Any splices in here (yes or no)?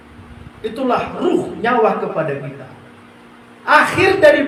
no